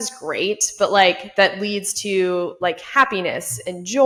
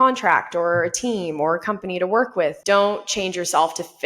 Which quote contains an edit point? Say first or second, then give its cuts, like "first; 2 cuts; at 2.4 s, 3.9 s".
second; 1 cut; at 2.6 s